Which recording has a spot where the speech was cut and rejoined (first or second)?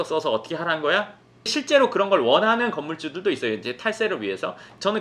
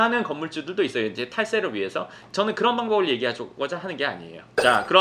first